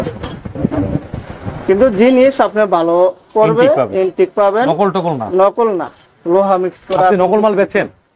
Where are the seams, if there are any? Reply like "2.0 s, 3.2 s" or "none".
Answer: none